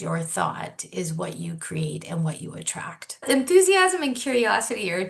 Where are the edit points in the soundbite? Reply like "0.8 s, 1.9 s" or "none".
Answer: 3.2 s